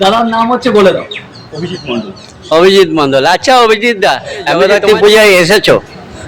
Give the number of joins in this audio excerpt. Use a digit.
1